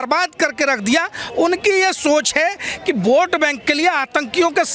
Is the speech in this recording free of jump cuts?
yes; 0 cuts

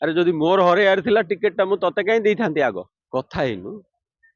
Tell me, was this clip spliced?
yes; 1 cut; at 3.0 s

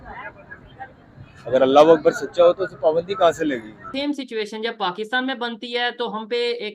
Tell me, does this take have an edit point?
yes; 1 cut; at 3.9 s

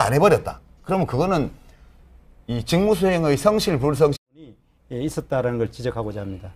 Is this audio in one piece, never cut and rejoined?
yes; 0 cuts

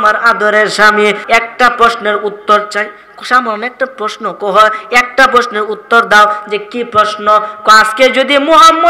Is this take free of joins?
no; 1 cut; at 1.2 s

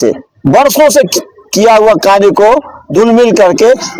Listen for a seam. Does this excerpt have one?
no; 0 cuts

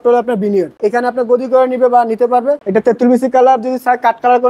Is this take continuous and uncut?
no; 2 cuts; at 0.8 s, 2.6 s

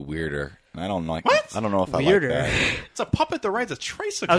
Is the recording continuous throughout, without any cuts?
yes; 0 cuts

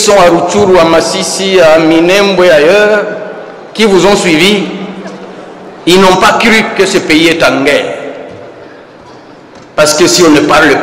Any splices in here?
no; 0 cuts

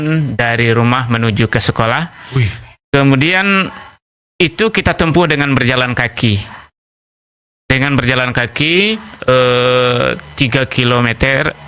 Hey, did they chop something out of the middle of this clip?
no; 0 cuts

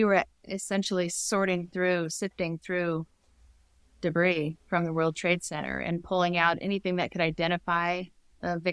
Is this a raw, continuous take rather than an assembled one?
yes; 0 cuts

